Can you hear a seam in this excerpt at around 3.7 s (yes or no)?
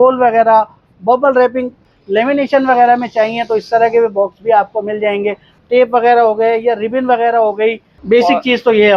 no